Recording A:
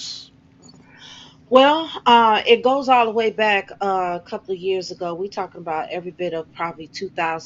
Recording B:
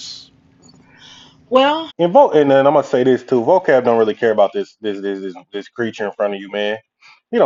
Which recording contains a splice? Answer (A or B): A